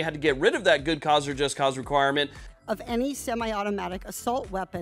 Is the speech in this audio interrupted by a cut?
yes; 1 cut; at 2.4 s

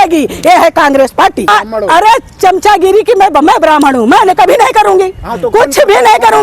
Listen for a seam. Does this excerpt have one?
yes; 1 cut; at 1.5 s

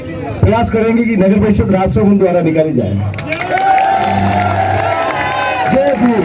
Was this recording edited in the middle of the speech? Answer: no; 0 cuts

